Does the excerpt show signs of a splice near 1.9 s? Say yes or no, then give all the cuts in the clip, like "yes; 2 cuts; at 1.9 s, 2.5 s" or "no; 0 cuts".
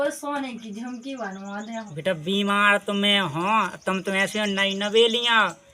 yes; 1 cut; at 1.9 s